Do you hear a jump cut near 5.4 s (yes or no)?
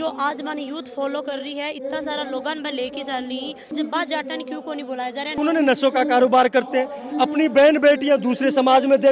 yes